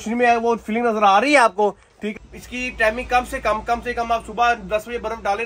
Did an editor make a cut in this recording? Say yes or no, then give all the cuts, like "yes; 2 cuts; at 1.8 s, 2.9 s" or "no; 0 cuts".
yes; 1 cut; at 2.1 s